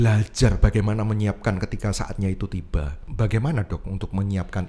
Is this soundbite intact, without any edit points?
no; 1 cut; at 3.0 s

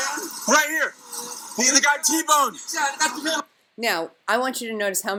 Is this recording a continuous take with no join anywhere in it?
yes; 0 cuts

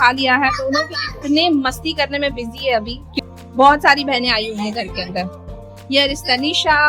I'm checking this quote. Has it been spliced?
yes; 1 cut; at 3.2 s

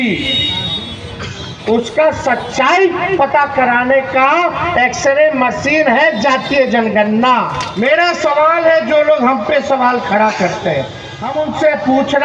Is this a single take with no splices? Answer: no; 2 cuts; at 7.6 s, 11.2 s

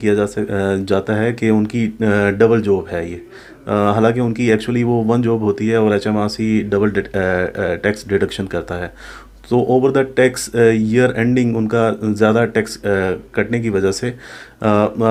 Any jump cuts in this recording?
no; 0 cuts

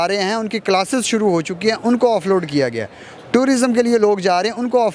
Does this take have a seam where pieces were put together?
no; 0 cuts

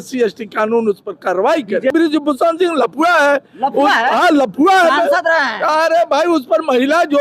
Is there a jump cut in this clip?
yes; 1 cut; at 1.9 s

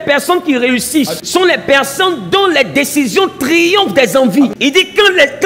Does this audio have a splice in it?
yes; 2 cuts; at 1.2 s, 4.5 s

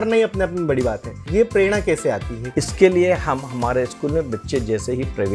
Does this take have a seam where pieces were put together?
yes; 2 cuts; at 1.2 s, 2.3 s

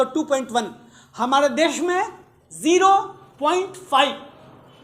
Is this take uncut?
yes; 0 cuts

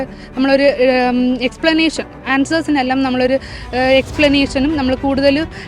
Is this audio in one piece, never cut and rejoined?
yes; 0 cuts

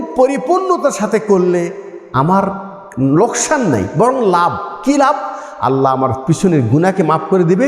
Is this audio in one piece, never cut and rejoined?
yes; 0 cuts

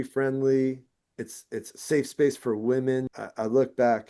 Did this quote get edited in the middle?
yes; 1 cut; at 3.1 s

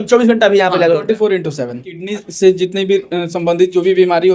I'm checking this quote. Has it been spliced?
yes; 1 cut; at 2.1 s

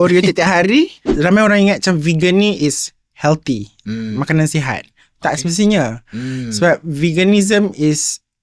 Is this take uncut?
no; 1 cut; at 1.1 s

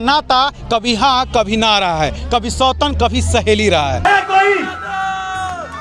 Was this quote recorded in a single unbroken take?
no; 1 cut; at 4.1 s

